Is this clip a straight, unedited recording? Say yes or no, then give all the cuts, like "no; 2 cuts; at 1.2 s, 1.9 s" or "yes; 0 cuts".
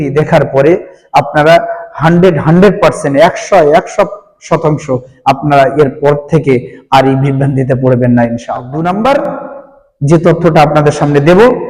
no; 1 cut; at 8.7 s